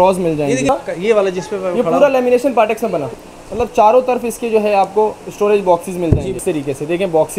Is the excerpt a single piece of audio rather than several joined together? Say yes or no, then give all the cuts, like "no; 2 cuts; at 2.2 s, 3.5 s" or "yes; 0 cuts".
no; 3 cuts; at 0.7 s, 3.1 s, 6.4 s